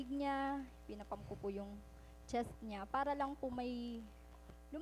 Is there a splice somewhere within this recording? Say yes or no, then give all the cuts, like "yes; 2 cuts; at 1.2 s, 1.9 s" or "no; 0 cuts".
no; 0 cuts